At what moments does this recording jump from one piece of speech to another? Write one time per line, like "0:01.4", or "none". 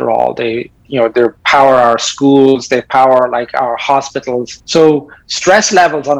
0:04.6